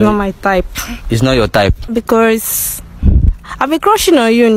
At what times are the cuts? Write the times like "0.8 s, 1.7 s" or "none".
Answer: 1.9 s

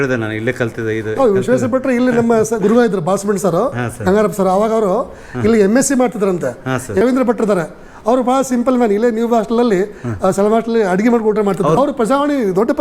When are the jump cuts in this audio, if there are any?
7.0 s, 11.8 s

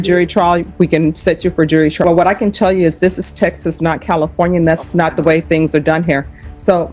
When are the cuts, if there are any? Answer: 2.0 s

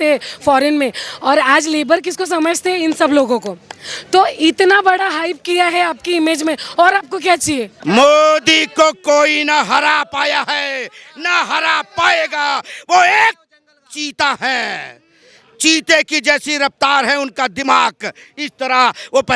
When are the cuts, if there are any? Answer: 7.7 s

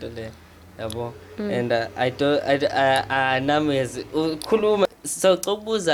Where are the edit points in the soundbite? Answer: 4.9 s

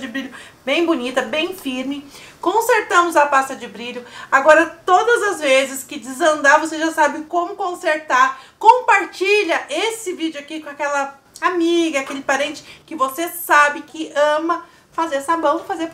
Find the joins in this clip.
13.9 s

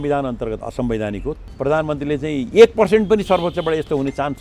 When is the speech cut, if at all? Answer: 1.4 s

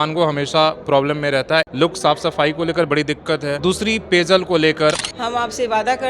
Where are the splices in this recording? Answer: 1.7 s, 3.6 s, 5.1 s

